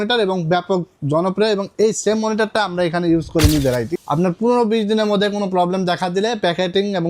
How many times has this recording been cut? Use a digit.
1